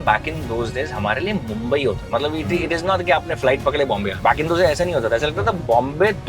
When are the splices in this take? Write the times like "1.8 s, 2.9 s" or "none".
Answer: 2.0 s, 4.1 s